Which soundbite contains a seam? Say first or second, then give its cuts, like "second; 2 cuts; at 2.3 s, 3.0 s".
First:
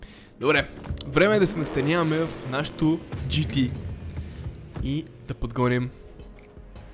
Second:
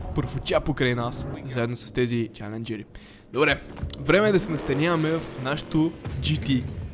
second; 1 cut; at 1.3 s